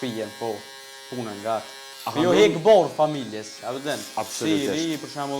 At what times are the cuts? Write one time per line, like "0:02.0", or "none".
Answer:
0:01.8